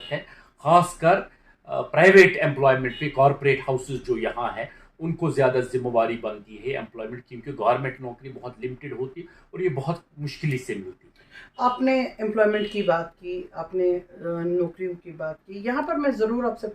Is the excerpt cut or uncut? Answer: uncut